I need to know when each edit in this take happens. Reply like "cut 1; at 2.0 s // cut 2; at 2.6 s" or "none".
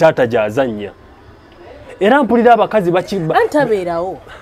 none